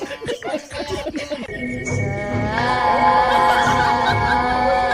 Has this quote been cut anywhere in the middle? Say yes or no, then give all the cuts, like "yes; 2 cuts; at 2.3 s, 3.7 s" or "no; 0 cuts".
yes; 1 cut; at 1.4 s